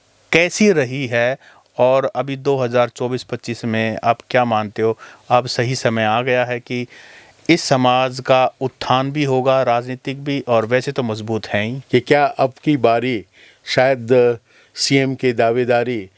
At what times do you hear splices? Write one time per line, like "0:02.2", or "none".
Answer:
0:11.8